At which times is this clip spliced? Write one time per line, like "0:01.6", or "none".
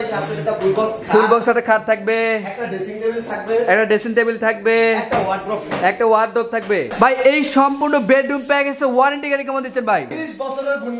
0:06.9
0:10.1